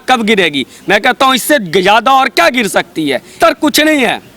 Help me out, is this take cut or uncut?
cut